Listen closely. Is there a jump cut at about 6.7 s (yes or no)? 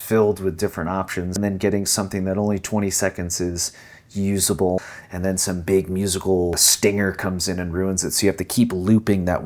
yes